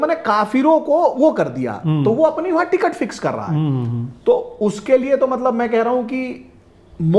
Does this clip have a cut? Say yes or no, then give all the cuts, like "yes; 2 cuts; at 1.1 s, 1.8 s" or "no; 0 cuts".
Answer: no; 0 cuts